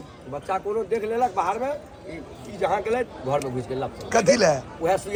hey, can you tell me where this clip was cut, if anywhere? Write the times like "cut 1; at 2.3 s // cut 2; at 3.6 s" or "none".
none